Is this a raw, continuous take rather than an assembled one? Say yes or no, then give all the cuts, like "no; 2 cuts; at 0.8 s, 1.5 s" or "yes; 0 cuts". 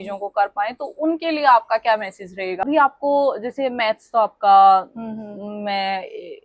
no; 1 cut; at 2.6 s